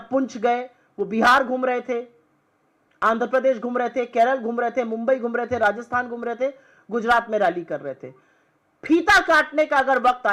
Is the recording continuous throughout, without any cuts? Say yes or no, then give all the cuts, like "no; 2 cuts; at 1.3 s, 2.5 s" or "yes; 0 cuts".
yes; 0 cuts